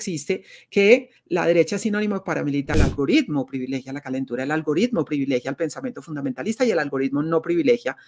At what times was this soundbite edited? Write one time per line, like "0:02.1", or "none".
0:02.7